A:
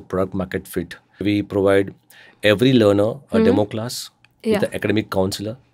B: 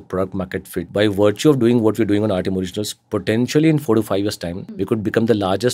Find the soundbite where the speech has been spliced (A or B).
B